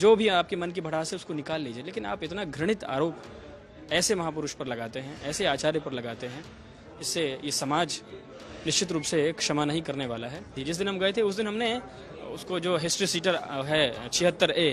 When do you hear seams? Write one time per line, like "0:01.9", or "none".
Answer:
0:10.6